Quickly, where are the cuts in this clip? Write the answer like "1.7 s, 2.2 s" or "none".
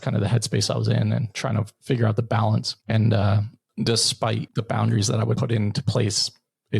2.7 s, 4.5 s, 5.4 s